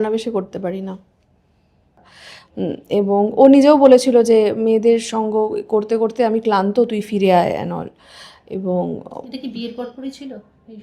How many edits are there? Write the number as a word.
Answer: one